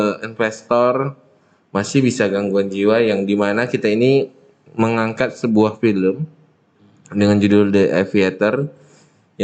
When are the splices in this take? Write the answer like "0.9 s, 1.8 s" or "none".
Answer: none